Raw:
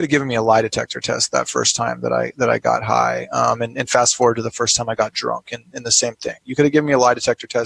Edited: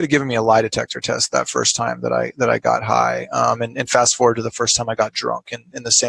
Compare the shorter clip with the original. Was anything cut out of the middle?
no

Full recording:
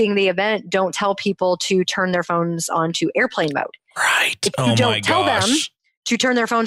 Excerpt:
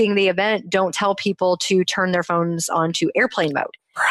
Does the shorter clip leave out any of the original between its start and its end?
no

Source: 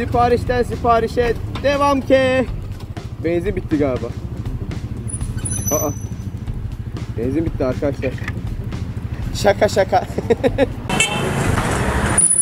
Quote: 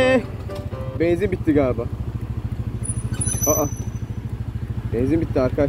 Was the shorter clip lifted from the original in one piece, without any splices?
yes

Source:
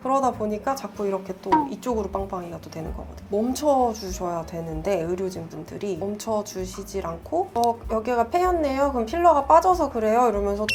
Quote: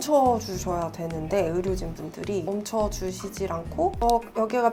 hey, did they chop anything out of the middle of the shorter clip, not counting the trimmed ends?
no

